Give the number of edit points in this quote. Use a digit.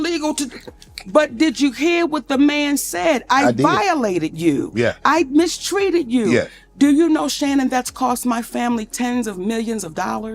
0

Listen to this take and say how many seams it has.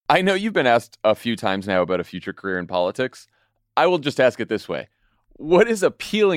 2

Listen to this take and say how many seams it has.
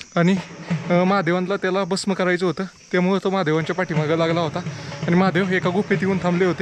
0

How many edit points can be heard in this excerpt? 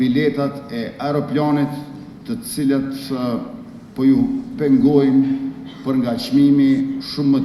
0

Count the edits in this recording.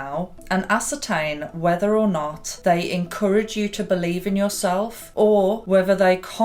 1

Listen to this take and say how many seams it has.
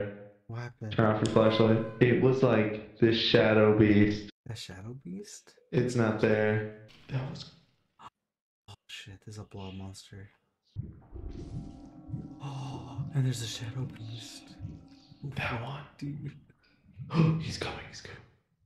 4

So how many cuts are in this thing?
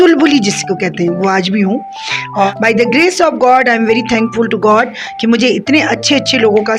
1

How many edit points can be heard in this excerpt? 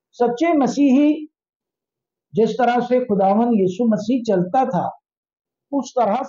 0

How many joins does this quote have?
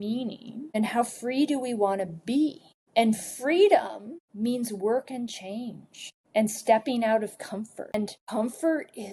1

